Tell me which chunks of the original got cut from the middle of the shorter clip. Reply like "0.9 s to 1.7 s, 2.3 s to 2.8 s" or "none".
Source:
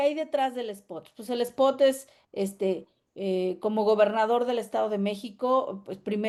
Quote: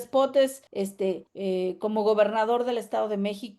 2.4 s to 2.7 s